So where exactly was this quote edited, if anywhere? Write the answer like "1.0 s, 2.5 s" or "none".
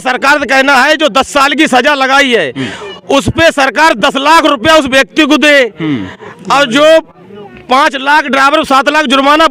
none

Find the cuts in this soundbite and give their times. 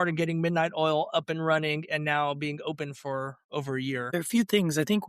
4.1 s

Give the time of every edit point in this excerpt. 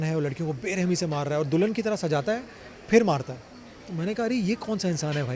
none

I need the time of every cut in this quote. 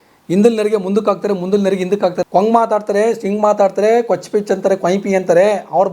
2.2 s

